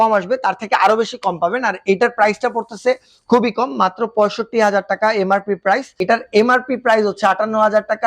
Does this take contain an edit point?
yes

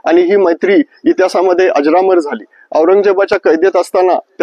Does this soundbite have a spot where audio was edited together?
no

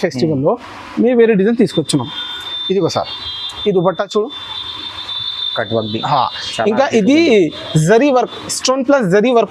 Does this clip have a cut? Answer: no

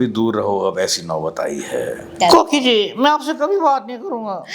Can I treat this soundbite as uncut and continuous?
no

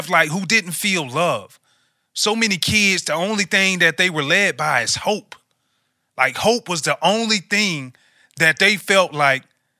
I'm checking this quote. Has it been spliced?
no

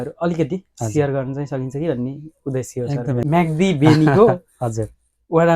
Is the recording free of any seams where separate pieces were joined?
no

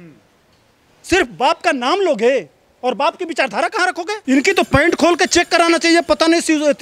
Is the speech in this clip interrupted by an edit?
yes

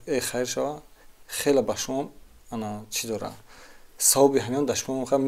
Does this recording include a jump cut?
no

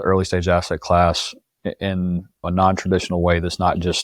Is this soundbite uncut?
no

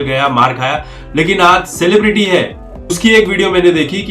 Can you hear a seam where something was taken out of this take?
yes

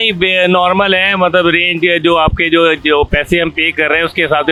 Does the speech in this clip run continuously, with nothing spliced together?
yes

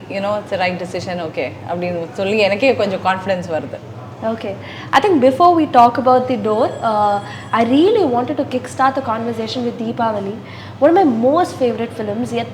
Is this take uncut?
yes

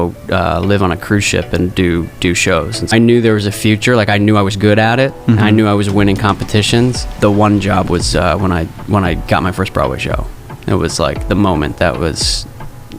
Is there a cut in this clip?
yes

